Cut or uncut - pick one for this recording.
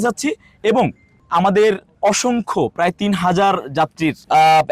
uncut